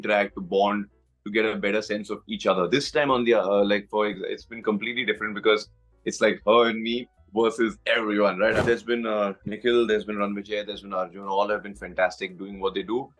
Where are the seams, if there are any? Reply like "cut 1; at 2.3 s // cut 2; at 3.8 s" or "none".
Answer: cut 1; at 8.6 s